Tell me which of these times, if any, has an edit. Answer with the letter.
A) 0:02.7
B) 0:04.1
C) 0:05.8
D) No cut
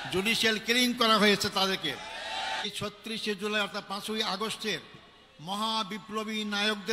A